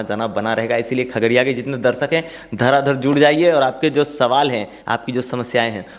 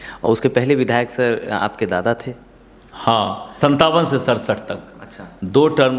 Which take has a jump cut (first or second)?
second